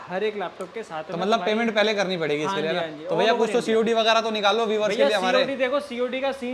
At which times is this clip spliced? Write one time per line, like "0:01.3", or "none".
none